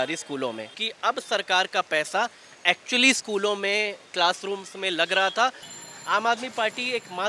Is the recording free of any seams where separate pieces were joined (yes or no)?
no